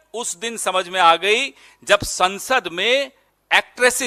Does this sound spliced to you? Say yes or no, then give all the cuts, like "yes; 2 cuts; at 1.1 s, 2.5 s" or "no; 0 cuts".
no; 0 cuts